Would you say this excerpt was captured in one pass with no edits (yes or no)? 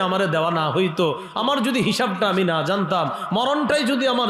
yes